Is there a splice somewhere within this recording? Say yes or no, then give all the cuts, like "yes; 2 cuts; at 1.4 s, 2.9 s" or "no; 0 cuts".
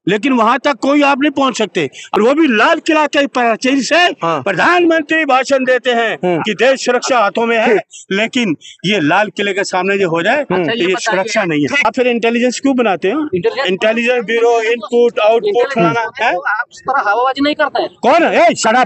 yes; 2 cuts; at 2.1 s, 11.9 s